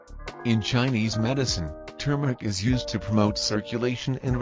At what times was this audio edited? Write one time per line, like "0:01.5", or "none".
none